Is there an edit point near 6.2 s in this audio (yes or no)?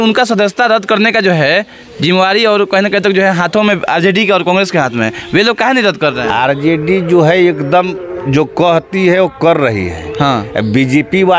yes